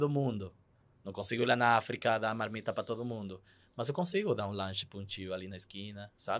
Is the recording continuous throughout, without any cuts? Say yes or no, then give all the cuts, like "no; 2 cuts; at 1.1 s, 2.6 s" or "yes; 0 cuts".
yes; 0 cuts